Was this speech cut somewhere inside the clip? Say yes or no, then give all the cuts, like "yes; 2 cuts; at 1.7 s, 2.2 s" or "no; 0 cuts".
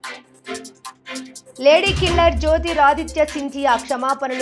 no; 0 cuts